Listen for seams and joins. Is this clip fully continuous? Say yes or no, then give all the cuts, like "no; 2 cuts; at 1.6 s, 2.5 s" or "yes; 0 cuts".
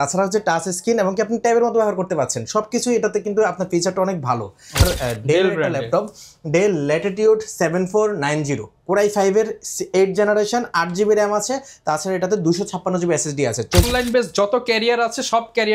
no; 2 cuts; at 4.8 s, 13.9 s